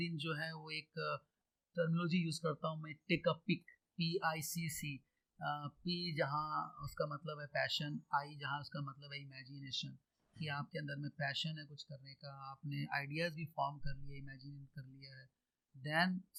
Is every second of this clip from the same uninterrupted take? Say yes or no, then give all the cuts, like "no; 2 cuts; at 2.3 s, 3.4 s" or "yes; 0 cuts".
yes; 0 cuts